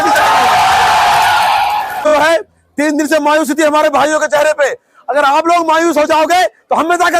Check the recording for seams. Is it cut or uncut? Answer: cut